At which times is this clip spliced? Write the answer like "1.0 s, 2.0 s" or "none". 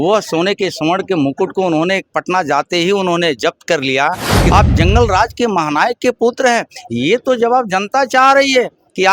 4.4 s